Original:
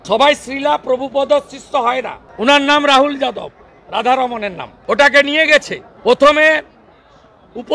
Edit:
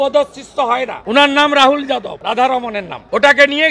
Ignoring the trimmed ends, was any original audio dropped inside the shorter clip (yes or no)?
yes